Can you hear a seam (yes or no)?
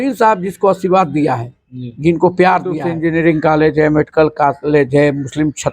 yes